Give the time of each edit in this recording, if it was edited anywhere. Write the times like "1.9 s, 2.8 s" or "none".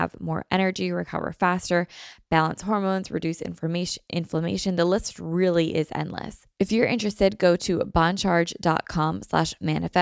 6.4 s